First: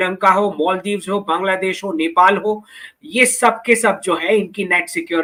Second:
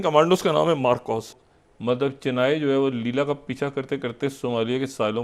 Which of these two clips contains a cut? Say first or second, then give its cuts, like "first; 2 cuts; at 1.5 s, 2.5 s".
second; 1 cut; at 1.3 s